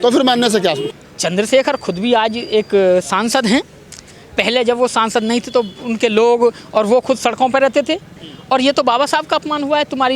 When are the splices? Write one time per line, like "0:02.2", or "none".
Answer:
0:00.9

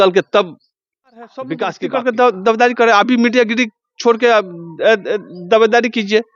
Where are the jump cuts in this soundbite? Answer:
0:01.9

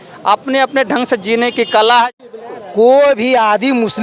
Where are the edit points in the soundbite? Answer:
0:02.3

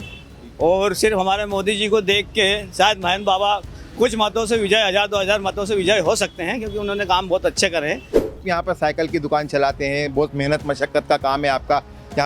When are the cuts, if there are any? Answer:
0:08.3

